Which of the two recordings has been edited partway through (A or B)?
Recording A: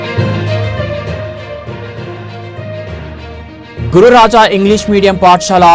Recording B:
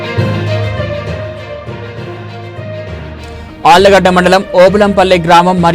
B